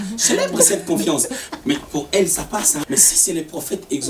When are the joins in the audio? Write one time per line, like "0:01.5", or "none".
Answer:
0:01.4
0:02.9